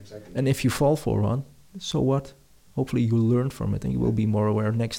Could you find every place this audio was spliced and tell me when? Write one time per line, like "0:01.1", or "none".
none